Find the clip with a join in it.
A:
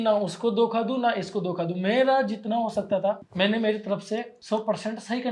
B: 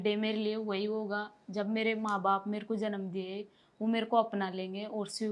A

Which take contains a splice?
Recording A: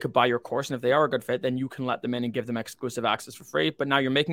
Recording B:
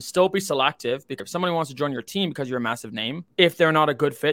B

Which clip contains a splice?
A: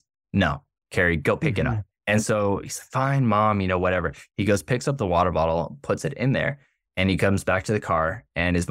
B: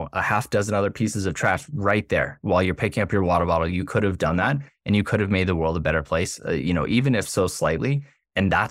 A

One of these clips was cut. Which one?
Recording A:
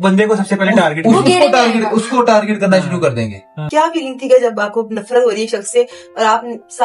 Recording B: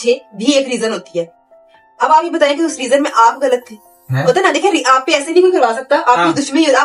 A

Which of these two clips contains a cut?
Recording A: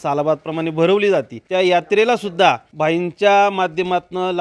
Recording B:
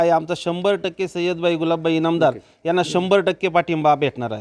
A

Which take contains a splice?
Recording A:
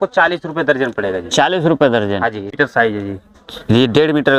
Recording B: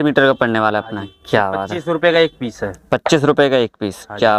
A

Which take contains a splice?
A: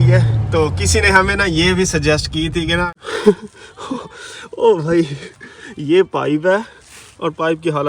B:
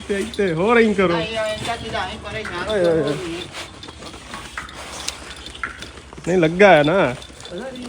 A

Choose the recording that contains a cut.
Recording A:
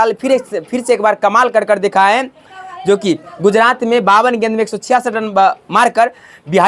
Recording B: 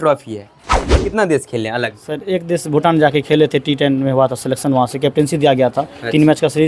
B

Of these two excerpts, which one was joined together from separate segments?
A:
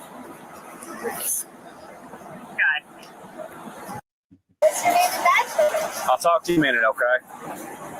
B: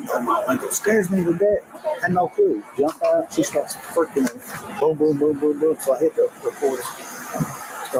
A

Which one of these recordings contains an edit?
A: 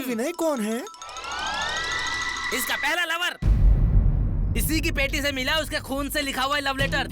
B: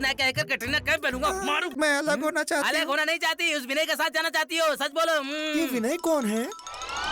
B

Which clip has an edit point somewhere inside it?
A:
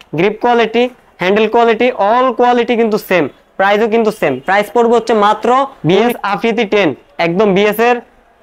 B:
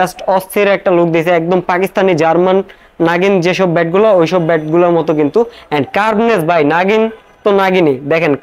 A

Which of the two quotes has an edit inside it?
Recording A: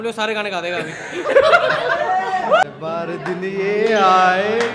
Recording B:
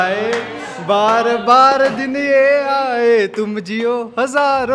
A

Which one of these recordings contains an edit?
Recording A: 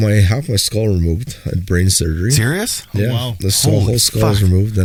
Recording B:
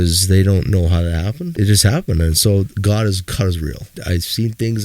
B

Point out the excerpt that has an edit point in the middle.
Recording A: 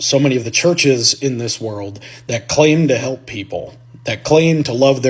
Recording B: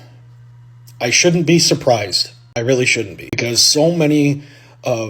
B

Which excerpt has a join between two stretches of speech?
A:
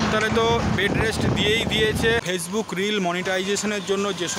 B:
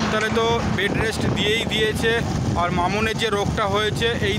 A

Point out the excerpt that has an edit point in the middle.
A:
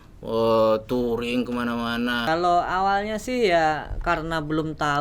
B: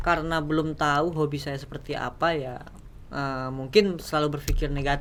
A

